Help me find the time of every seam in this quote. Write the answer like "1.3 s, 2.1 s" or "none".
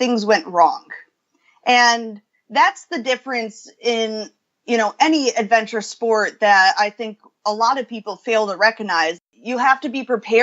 9.2 s